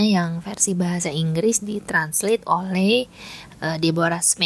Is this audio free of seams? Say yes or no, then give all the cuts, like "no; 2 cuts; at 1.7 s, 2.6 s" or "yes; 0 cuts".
yes; 0 cuts